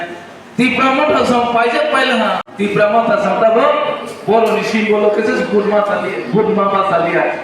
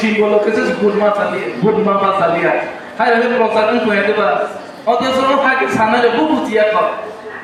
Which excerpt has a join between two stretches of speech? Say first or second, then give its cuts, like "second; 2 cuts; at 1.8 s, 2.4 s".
first; 1 cut; at 2.4 s